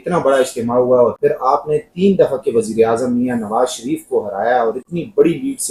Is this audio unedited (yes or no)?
yes